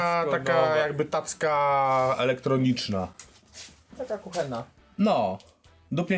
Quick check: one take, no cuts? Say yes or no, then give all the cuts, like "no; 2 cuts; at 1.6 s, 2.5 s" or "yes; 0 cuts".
yes; 0 cuts